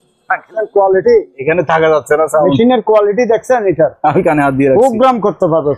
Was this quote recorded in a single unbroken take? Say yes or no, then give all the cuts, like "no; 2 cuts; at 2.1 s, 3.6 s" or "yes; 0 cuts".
yes; 0 cuts